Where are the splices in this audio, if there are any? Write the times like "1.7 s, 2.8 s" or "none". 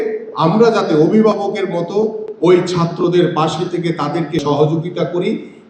4.4 s